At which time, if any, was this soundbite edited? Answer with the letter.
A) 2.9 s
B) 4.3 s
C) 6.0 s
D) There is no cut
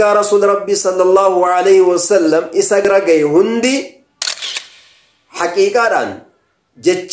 A